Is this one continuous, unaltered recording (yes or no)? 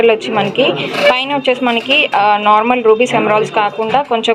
yes